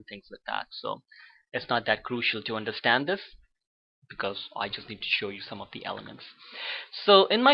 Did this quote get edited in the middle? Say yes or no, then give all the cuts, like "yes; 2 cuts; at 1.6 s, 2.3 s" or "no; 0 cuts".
yes; 1 cut; at 5.5 s